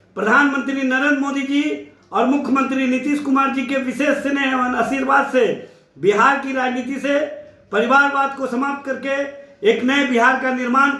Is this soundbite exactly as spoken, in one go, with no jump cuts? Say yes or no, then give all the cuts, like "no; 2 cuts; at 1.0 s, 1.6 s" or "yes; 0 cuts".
yes; 0 cuts